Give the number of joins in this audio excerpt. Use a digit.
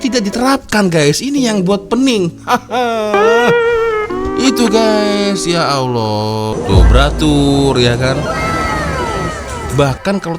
1